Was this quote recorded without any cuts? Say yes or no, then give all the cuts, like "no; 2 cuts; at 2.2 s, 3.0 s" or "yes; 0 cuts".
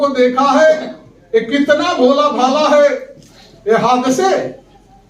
yes; 0 cuts